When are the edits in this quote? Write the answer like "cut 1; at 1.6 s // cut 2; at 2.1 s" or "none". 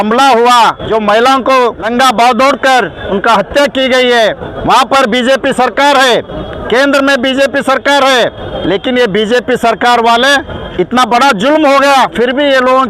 cut 1; at 0.8 s // cut 2; at 1.9 s // cut 3; at 3.0 s // cut 4; at 4.5 s // cut 5; at 6.5 s // cut 6; at 8.5 s // cut 7; at 10.6 s